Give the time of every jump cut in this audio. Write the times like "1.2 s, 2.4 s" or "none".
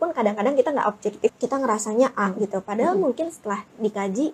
1.3 s